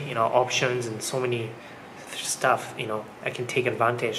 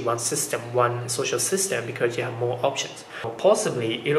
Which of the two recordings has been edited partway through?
second; 1 cut; at 3.3 s

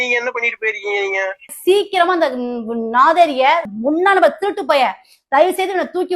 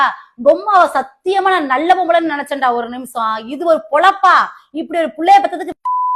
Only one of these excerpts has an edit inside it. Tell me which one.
first; 2 cuts; at 1.5 s, 3.7 s

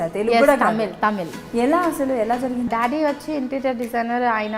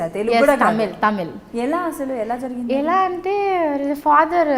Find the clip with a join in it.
first; 1 cut; at 2.7 s

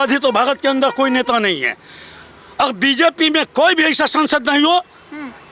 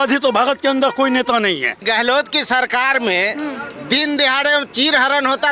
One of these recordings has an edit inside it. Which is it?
second; 1 cut; at 1.8 s

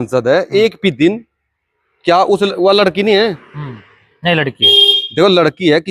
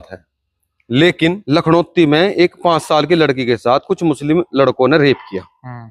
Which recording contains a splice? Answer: second; 1 cut; at 1.4 s

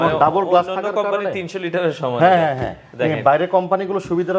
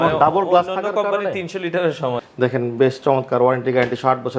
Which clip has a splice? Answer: second; 1 cut; at 2.1 s

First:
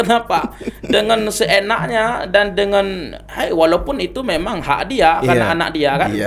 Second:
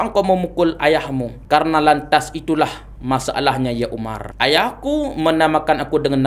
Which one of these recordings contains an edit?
second; 2 cuts; at 1.3 s, 4.2 s

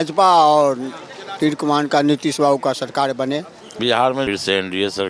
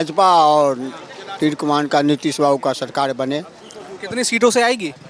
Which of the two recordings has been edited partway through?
first; 1 cut; at 3.7 s

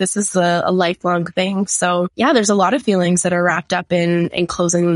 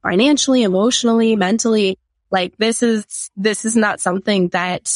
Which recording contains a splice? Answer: first; 1 cut; at 2.1 s

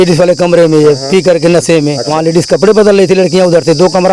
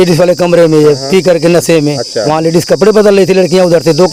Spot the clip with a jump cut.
first; 1 cut; at 2.1 s

